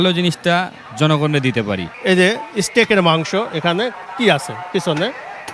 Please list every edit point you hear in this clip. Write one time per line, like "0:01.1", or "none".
0:01.9

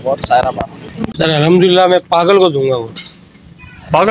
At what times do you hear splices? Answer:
0:01.0

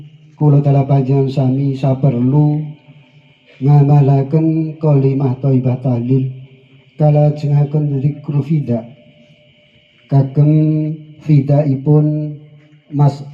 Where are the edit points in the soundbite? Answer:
none

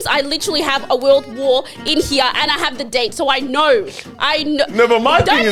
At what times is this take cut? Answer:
none

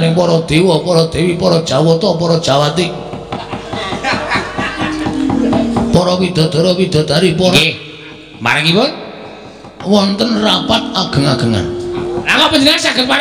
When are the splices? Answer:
0:07.5
0:12.3

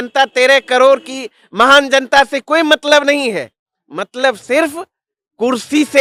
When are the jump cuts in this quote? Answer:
none

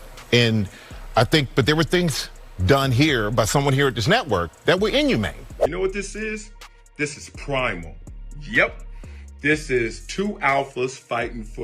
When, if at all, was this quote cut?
0:05.7

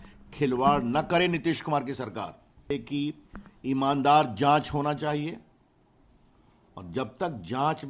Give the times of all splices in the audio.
0:02.7

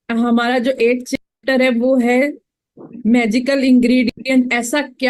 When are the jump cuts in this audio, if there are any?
none

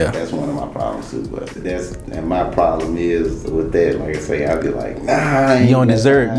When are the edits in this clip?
0:01.5

